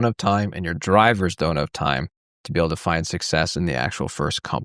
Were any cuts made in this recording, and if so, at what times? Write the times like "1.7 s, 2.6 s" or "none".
none